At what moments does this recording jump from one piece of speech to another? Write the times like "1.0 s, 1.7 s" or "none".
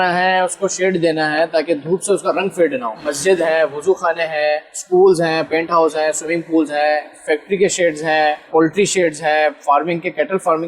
3.1 s, 5.5 s, 8.4 s